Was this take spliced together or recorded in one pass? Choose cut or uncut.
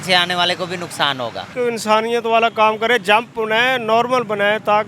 cut